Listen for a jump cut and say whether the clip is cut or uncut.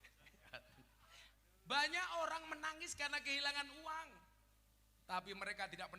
cut